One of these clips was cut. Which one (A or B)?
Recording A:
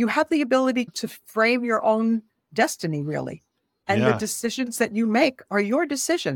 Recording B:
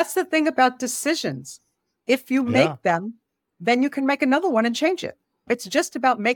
A